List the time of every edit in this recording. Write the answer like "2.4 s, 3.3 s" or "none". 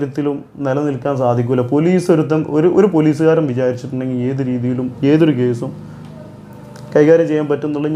none